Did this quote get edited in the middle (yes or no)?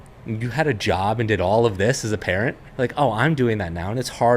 yes